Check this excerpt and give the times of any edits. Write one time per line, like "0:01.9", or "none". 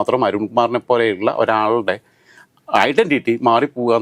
none